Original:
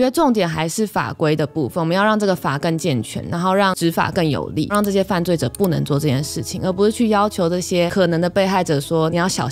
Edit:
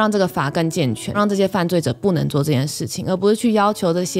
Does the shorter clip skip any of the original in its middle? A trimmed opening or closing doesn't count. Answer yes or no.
yes